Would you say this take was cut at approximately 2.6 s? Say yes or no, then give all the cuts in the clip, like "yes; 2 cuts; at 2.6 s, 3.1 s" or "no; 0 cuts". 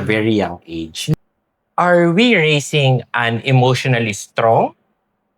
no; 1 cut; at 1.1 s